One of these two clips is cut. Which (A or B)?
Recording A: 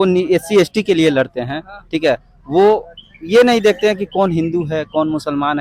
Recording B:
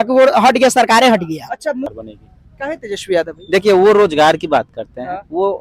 B